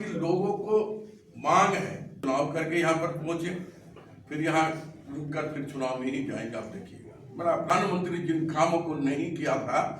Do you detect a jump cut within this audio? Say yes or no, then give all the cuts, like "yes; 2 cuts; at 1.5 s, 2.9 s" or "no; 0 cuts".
yes; 2 cuts; at 2.2 s, 7.7 s